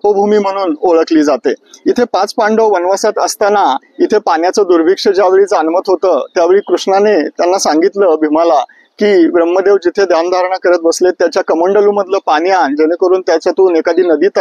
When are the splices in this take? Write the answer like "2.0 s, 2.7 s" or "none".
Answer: none